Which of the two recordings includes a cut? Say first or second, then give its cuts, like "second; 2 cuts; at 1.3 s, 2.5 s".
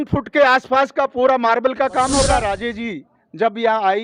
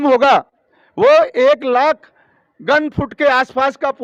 first; 1 cut; at 2.4 s